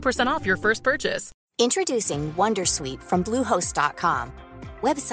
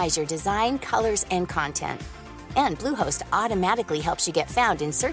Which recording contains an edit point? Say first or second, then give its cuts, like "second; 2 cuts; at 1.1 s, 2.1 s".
first; 1 cut; at 1.3 s